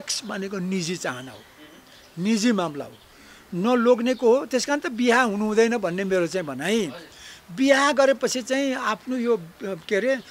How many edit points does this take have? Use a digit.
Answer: 0